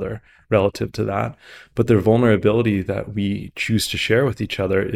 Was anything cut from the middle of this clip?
no; 0 cuts

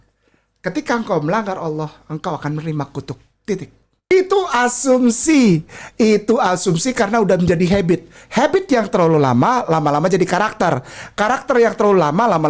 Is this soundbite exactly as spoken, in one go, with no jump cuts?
no; 1 cut; at 4.1 s

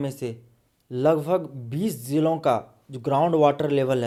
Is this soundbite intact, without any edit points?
yes; 0 cuts

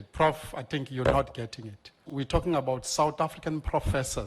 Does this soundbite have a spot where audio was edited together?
yes; 1 cut; at 2.0 s

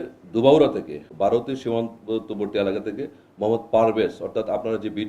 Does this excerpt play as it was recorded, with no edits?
no; 1 cut; at 1.1 s

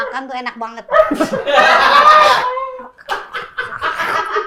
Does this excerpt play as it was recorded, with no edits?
yes; 0 cuts

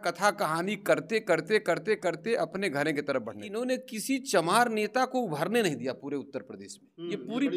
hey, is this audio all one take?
no; 1 cut; at 3.4 s

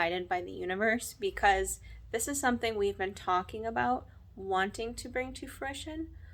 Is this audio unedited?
yes; 0 cuts

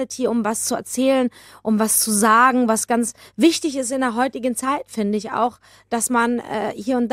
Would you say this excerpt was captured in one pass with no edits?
yes; 0 cuts

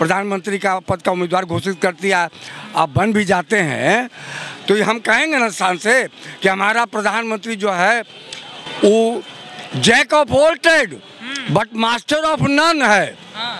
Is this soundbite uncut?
yes; 0 cuts

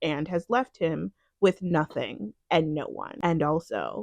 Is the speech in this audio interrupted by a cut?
yes; 1 cut; at 3.1 s

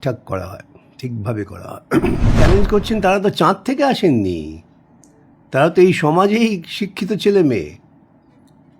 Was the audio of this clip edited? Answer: yes; 1 cut; at 2.4 s

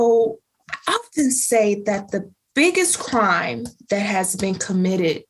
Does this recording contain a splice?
no; 0 cuts

